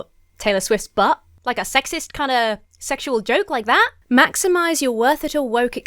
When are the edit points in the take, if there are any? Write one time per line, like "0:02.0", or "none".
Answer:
0:01.3
0:04.0

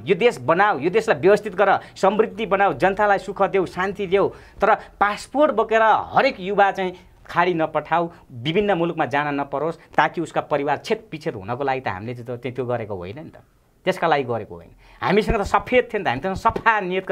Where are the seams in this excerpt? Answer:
none

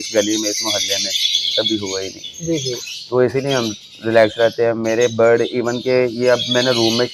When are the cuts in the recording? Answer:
none

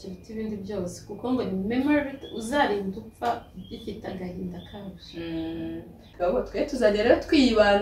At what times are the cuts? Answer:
0:06.1

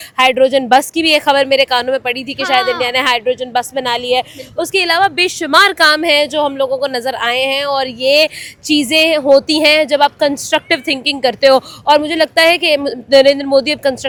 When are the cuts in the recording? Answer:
none

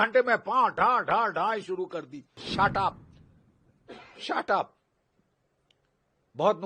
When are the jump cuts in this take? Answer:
0:02.4

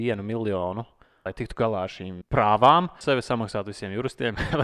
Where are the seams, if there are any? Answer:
0:01.3
0:02.1
0:03.0

